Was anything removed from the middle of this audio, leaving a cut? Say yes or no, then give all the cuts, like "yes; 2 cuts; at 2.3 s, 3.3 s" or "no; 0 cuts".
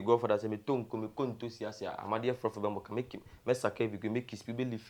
no; 0 cuts